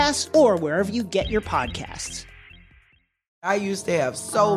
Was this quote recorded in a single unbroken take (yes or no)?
no